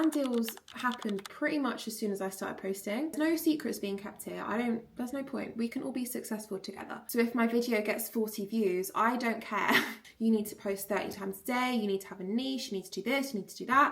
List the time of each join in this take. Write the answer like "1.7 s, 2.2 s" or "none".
3.1 s, 7.0 s, 10.0 s